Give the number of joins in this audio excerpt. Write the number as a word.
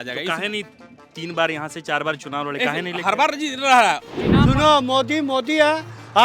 one